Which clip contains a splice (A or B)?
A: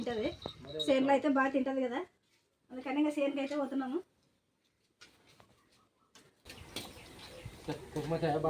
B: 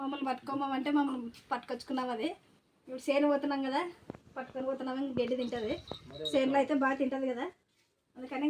A